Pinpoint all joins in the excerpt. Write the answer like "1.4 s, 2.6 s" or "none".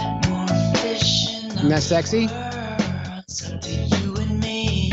2.8 s